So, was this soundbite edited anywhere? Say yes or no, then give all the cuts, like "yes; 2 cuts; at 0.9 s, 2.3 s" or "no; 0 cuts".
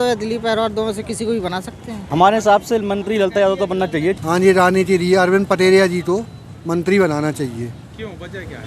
yes; 2 cuts; at 1.9 s, 4.2 s